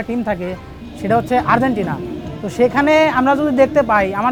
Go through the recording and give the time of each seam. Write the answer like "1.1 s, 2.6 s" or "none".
none